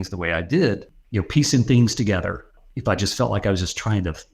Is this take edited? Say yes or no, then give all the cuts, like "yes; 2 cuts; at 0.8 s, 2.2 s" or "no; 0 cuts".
yes; 2 cuts; at 1.0 s, 2.6 s